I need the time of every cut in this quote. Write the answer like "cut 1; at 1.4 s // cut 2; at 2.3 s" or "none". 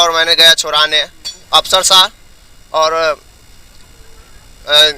cut 1; at 1.4 s